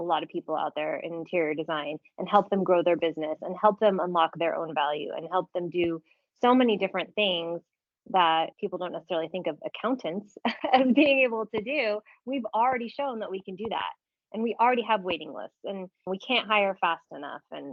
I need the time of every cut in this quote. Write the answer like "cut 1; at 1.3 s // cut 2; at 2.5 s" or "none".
none